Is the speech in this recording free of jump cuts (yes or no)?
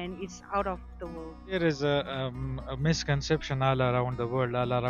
no